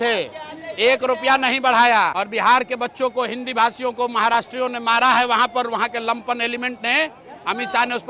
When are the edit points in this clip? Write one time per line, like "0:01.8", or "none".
0:02.1